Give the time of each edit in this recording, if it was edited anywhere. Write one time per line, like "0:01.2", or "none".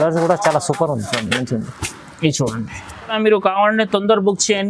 0:03.1